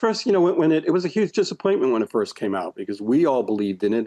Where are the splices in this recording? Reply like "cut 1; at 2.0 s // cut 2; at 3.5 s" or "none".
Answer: none